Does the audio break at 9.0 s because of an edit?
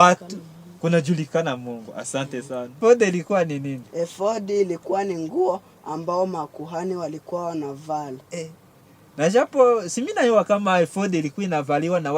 no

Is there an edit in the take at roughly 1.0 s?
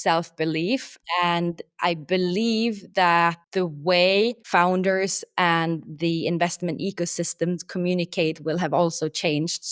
yes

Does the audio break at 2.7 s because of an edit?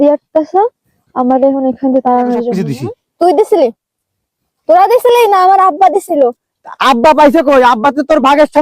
yes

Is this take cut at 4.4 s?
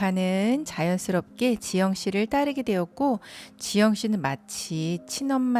no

